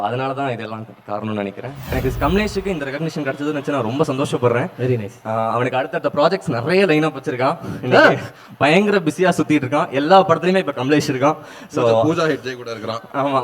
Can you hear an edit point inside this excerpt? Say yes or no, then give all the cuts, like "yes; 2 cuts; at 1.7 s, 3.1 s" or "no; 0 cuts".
yes; 1 cut; at 1.8 s